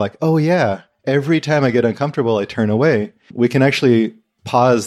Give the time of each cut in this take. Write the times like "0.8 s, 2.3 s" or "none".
none